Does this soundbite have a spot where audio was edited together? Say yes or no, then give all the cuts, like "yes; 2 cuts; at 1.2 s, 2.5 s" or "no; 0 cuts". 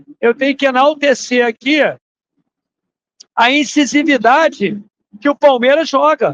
no; 0 cuts